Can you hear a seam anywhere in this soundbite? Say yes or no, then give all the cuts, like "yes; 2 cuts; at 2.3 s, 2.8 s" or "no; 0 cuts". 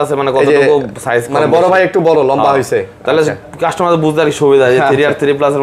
no; 0 cuts